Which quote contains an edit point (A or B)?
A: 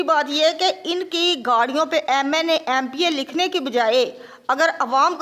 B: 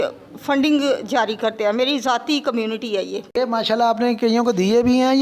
B